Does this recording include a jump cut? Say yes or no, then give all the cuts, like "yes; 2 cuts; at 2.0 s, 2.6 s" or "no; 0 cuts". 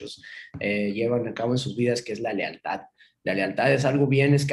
no; 0 cuts